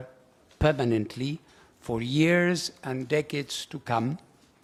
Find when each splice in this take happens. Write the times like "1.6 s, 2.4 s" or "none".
none